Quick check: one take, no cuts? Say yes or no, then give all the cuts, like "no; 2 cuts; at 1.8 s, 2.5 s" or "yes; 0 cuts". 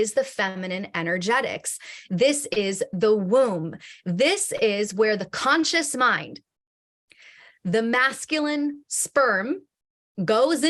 yes; 0 cuts